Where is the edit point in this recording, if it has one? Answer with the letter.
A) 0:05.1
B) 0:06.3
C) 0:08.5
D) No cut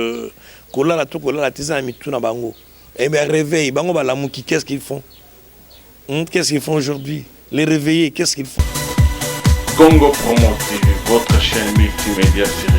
C